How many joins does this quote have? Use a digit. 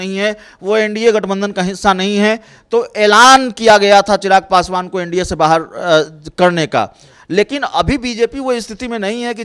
0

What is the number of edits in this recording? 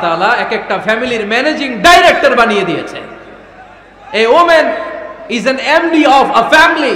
0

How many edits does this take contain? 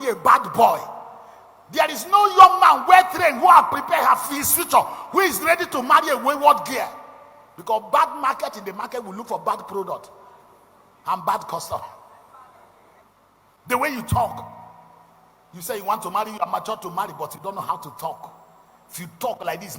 1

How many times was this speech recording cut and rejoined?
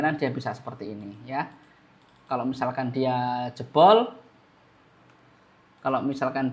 0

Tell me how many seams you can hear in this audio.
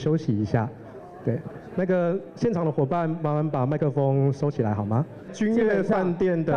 1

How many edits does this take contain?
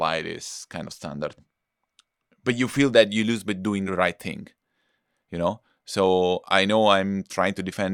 1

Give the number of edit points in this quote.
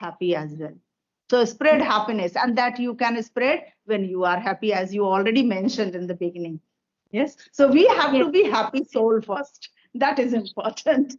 0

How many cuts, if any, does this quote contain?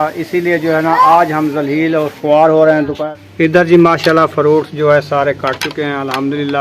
1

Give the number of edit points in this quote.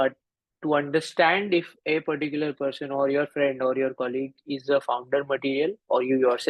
0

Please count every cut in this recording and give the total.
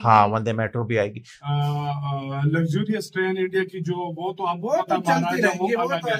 1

